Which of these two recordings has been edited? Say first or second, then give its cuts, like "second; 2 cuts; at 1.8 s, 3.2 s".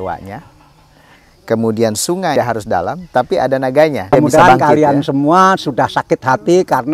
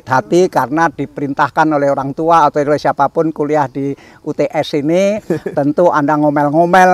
first; 2 cuts; at 2.3 s, 4.1 s